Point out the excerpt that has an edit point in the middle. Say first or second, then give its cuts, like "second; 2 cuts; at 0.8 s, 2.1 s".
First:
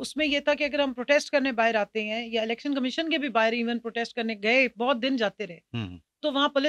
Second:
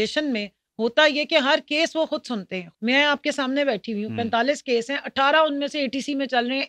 second; 1 cut; at 2.6 s